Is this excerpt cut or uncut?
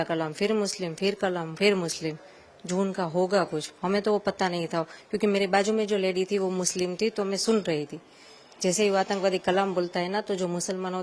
uncut